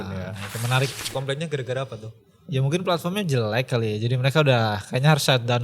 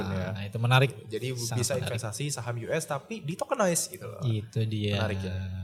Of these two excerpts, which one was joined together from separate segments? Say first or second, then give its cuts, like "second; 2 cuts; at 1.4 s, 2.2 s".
first; 1 cut; at 1.1 s